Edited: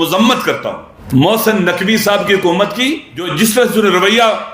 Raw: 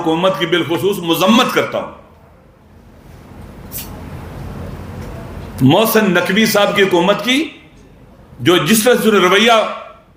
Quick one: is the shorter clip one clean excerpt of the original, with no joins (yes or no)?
no